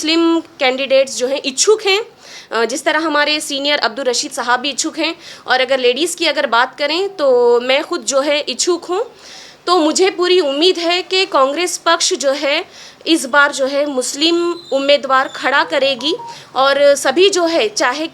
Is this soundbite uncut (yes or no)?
yes